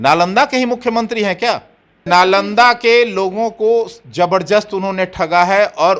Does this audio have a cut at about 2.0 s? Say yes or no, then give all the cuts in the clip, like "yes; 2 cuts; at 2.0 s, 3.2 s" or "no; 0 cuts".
yes; 1 cut; at 2.0 s